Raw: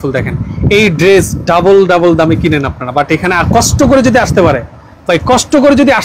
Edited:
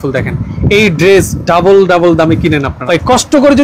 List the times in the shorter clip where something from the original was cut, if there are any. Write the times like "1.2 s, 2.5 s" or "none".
2.7 s

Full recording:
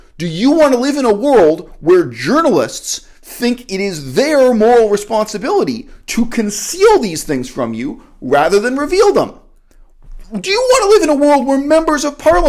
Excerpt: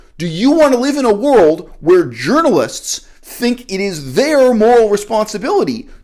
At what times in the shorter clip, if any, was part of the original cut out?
none

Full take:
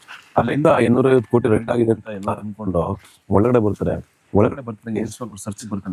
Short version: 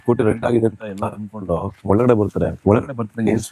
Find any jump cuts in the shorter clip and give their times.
1.7 s, 2.6 s

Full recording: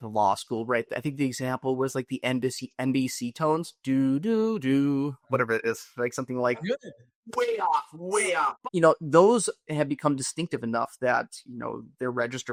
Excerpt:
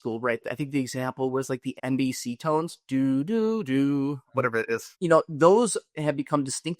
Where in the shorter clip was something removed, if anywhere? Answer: 1.8 s, 4.9 s

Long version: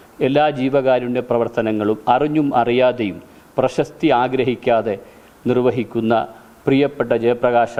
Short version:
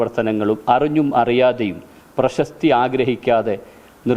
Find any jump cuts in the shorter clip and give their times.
none

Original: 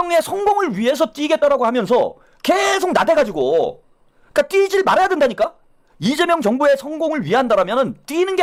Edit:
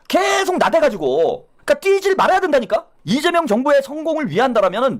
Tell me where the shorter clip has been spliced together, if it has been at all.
1.5 s, 3.0 s

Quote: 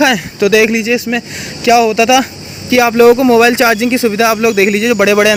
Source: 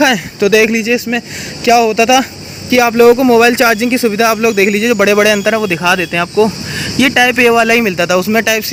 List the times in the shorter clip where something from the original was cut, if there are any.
none

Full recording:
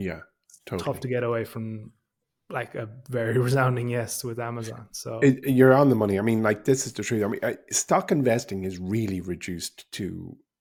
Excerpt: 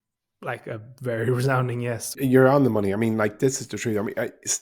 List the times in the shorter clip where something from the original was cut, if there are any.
2.1 s

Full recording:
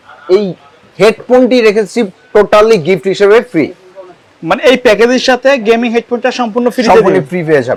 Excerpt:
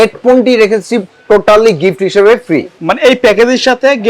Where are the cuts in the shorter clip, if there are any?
2.8 s

